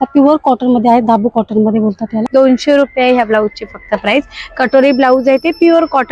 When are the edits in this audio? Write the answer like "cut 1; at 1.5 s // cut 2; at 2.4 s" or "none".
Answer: cut 1; at 2.2 s